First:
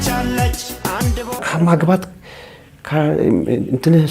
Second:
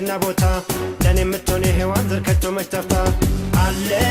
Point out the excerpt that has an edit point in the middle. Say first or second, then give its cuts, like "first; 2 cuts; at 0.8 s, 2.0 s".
first; 1 cut; at 1.3 s